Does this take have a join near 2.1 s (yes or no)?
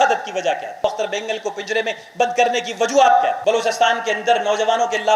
no